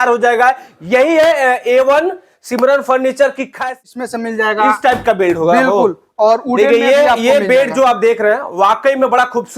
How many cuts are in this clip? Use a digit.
1